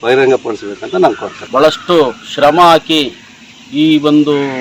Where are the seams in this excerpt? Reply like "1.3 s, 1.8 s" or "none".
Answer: 1.3 s